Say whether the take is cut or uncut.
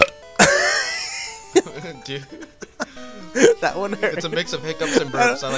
uncut